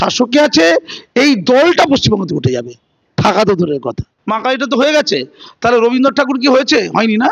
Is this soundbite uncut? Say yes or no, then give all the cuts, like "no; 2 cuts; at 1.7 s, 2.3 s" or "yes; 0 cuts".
no; 1 cut; at 4.1 s